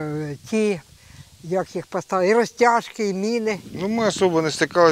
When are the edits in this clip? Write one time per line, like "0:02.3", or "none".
0:03.7